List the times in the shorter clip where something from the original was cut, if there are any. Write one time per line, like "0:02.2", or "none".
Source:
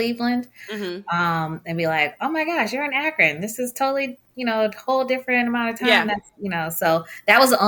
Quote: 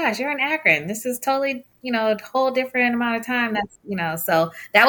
none